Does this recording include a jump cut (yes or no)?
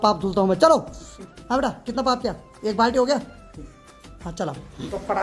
no